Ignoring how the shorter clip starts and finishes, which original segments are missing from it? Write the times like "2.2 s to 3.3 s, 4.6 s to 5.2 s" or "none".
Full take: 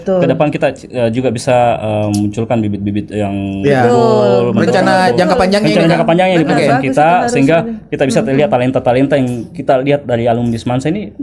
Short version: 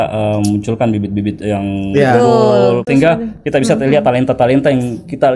4.5 s to 7.3 s